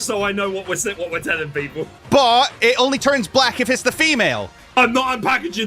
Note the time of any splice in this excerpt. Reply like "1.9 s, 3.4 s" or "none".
2.0 s, 4.7 s